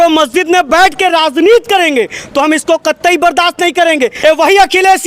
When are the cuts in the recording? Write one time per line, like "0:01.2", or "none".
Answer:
0:04.2